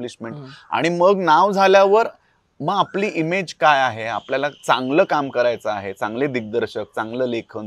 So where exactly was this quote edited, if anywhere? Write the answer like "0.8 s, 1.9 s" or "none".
none